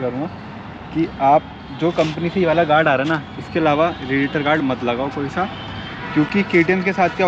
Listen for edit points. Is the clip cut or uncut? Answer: uncut